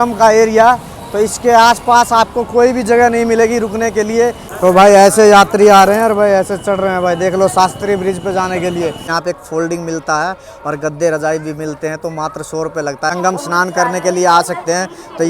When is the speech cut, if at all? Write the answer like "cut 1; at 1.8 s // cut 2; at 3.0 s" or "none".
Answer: cut 1; at 4.4 s // cut 2; at 9.1 s // cut 3; at 13.1 s